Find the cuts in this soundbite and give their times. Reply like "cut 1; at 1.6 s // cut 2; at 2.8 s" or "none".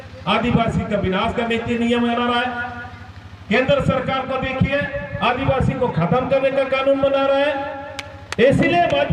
none